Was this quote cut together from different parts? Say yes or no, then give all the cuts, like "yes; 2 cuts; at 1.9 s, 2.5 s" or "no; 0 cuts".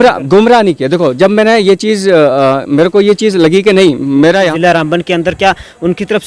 yes; 1 cut; at 4.5 s